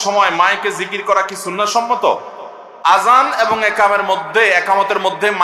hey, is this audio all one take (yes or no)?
yes